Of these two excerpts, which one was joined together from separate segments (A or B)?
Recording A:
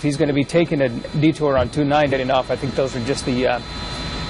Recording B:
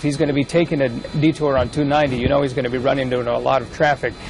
B